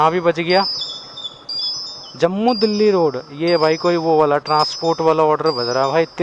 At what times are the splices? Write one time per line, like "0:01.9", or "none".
none